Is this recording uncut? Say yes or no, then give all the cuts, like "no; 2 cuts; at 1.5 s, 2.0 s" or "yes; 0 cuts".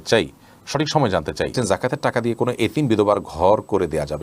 no; 1 cut; at 1.5 s